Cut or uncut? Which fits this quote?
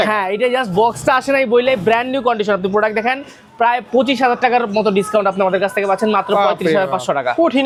uncut